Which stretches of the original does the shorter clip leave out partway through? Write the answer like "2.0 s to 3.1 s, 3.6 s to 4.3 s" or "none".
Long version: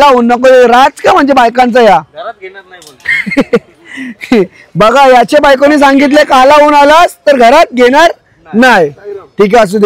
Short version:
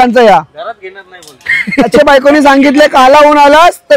3.6 s to 5.3 s